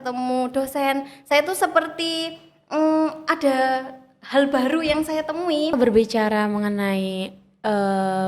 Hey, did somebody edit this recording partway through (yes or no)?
yes